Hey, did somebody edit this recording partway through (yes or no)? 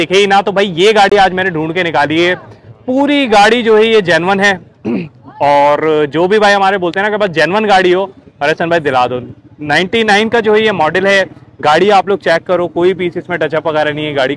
no